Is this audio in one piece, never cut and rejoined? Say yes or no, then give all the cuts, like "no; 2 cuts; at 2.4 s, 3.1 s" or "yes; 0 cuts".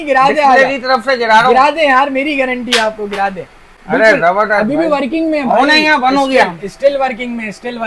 yes; 0 cuts